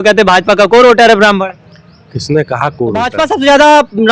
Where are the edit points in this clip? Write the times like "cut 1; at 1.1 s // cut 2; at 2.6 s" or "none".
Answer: cut 1; at 3.1 s

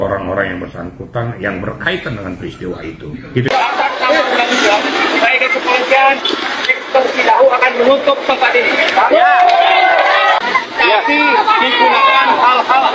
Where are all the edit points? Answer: cut 1; at 3.5 s

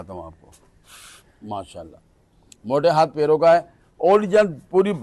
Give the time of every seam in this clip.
none

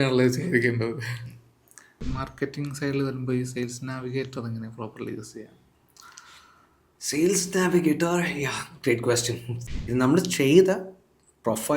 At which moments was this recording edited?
cut 1; at 2.0 s // cut 2; at 9.5 s

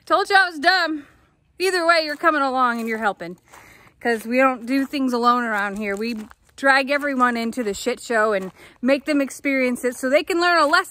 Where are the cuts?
none

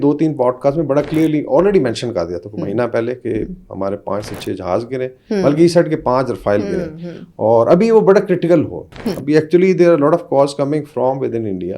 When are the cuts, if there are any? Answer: none

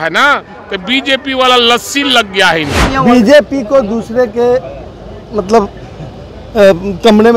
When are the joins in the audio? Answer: cut 1; at 2.8 s

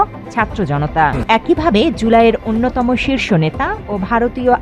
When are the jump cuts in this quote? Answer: cut 1; at 1.2 s

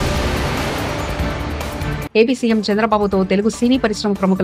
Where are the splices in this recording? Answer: none

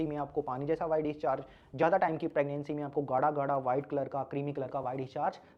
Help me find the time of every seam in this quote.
none

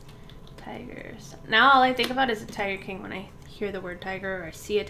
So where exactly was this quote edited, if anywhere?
none

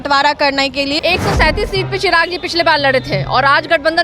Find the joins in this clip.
cut 1; at 1.0 s

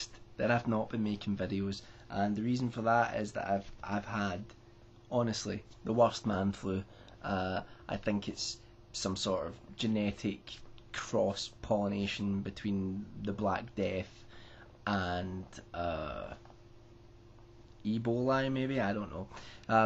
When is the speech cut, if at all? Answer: cut 1; at 18.7 s

